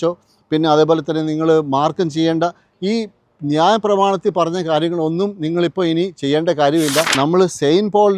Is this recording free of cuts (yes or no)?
no